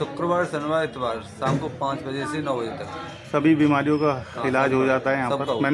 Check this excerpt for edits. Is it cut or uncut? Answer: uncut